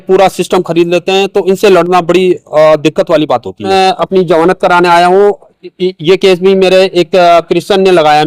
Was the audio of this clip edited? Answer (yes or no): yes